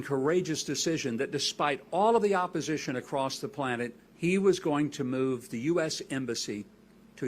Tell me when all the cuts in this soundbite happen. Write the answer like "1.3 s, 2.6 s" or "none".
4.0 s